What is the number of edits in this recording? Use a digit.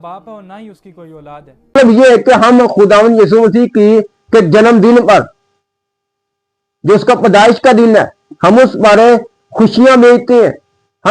1